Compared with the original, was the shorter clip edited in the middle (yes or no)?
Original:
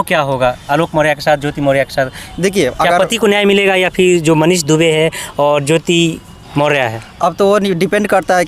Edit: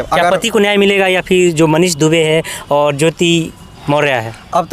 no